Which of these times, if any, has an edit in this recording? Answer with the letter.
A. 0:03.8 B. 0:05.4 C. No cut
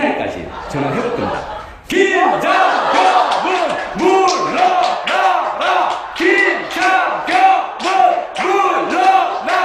B